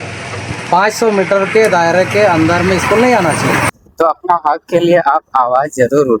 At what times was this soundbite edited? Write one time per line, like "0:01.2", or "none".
0:03.7